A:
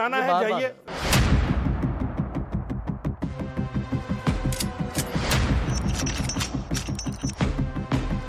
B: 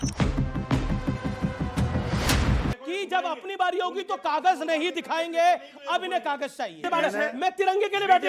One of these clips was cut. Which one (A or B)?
B